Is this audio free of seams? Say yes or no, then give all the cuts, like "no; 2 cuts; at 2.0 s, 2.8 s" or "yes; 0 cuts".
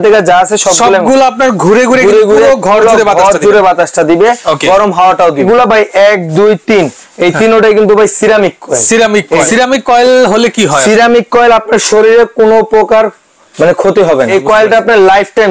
no; 3 cuts; at 5.4 s, 9.5 s, 14.3 s